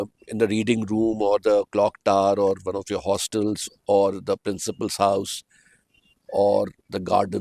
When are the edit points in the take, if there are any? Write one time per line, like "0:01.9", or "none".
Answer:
none